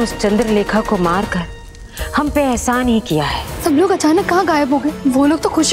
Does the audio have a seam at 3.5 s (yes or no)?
yes